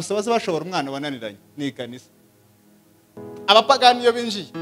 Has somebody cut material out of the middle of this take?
yes; 1 cut; at 3.1 s

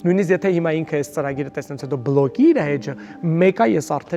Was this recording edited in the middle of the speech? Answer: no; 0 cuts

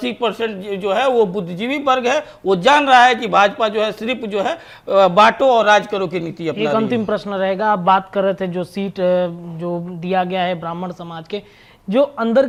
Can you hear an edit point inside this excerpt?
no; 0 cuts

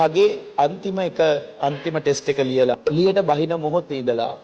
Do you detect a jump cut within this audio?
yes; 1 cut; at 2.8 s

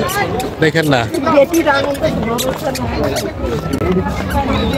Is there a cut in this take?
no; 0 cuts

